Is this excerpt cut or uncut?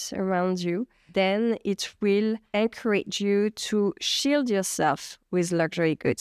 cut